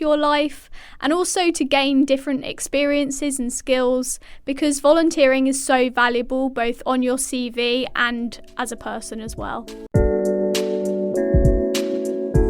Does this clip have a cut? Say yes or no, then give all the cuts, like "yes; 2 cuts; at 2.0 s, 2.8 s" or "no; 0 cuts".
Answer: yes; 1 cut; at 9.9 s